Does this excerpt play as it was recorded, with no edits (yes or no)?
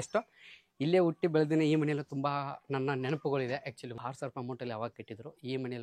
no